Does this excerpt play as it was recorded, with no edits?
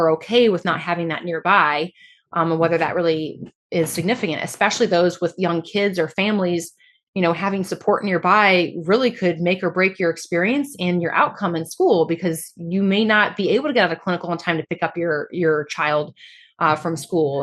yes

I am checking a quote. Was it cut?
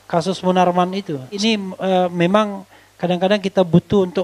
yes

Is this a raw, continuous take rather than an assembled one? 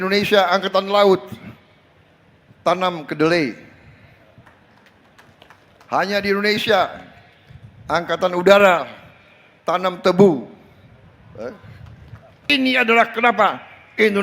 no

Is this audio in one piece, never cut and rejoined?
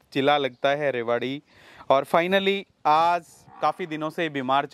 yes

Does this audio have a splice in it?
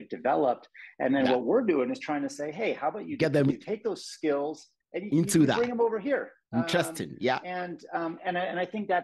no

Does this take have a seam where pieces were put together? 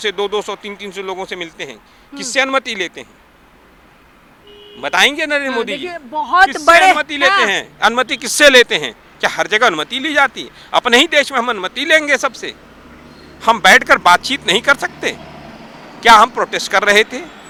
no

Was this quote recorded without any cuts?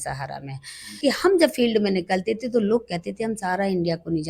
no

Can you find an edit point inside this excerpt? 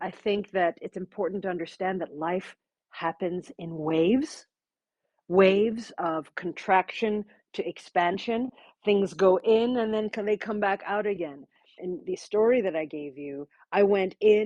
yes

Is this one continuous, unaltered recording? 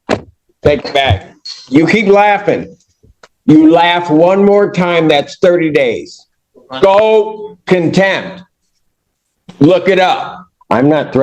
no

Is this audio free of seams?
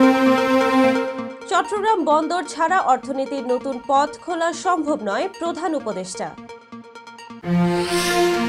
no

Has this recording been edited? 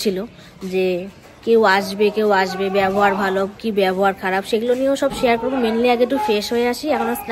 no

